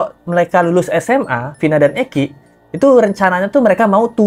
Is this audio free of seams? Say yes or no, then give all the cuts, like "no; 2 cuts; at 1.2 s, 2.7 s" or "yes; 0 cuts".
yes; 0 cuts